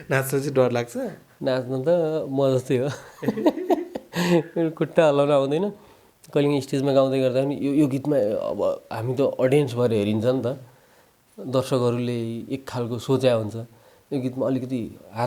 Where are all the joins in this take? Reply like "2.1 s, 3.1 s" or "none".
1.2 s

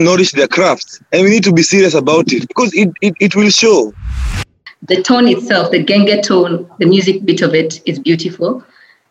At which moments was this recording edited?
0.9 s, 2.4 s, 4.5 s

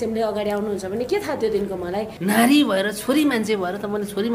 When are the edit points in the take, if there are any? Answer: 2.1 s

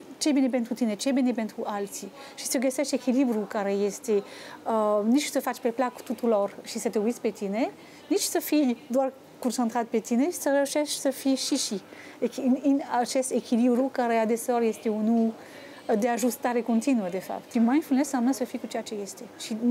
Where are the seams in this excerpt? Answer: 17.4 s

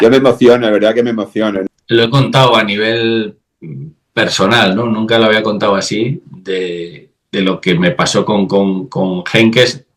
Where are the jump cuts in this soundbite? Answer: 1.7 s

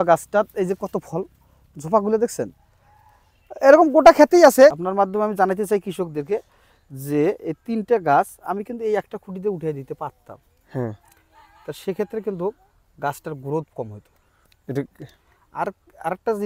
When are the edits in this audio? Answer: 4.7 s

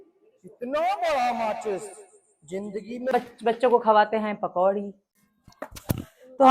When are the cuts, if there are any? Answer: 3.1 s

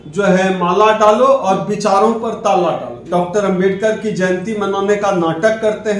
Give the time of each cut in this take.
2.9 s

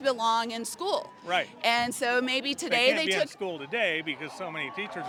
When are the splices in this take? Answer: none

